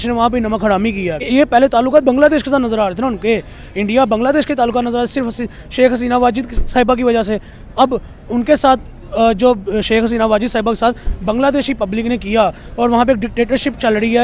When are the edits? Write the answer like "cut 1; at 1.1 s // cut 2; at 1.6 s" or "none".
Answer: cut 1; at 1.2 s